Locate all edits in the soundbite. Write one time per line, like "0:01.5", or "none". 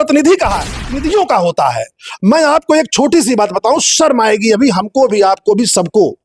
0:01.0